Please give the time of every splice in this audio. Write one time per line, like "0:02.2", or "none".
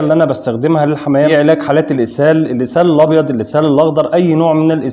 0:01.3